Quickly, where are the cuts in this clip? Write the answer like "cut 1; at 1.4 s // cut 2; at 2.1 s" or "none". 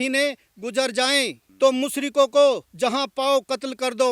cut 1; at 1.4 s